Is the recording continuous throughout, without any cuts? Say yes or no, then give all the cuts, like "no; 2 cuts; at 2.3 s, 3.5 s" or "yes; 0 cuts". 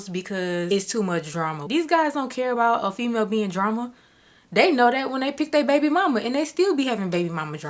no; 1 cut; at 1.6 s